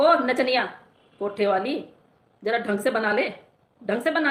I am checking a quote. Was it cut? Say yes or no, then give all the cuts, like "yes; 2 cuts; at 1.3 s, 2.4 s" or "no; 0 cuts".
no; 0 cuts